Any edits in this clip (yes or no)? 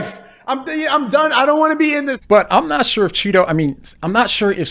yes